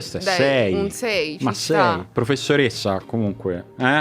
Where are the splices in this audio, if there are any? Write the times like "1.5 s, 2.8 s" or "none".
2.1 s